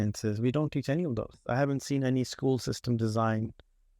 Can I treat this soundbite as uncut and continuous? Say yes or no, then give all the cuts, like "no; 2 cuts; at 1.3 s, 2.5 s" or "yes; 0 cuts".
no; 1 cut; at 1.4 s